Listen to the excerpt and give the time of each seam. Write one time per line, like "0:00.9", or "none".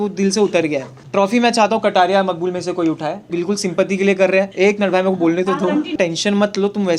0:01.0
0:03.3
0:04.5
0:05.9